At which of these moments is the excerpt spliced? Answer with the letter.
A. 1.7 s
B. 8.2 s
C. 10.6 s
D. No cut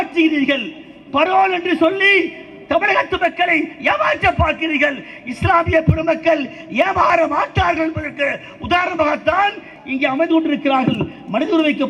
D